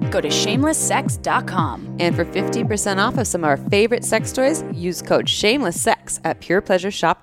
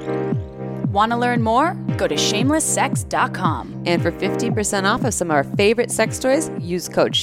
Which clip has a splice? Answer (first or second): second